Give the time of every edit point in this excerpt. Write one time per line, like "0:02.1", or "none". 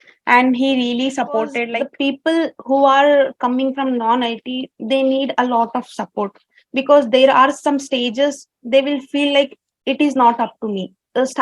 0:01.6

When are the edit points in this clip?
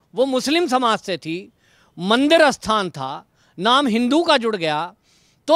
none

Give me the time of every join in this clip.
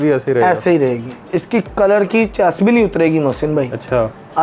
0:01.3

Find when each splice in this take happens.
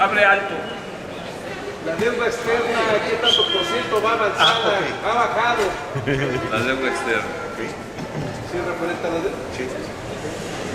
0:04.3

